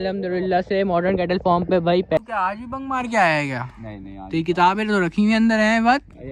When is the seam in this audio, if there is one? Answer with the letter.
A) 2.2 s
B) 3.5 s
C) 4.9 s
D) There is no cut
A